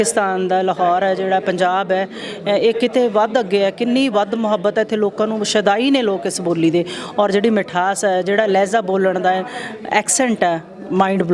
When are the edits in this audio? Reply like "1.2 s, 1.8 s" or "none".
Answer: none